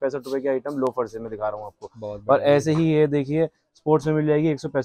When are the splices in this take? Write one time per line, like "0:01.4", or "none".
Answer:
none